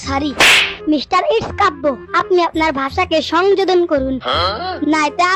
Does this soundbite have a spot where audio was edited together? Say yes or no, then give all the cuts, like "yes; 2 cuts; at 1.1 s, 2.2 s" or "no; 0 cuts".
no; 0 cuts